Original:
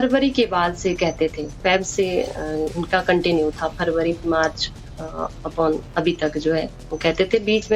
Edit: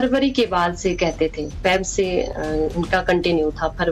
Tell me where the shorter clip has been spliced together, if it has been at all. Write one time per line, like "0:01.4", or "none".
none